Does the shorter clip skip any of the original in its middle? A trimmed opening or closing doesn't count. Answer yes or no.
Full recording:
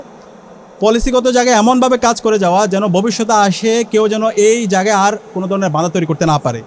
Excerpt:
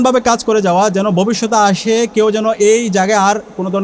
no